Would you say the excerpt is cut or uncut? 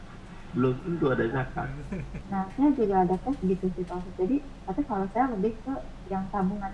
cut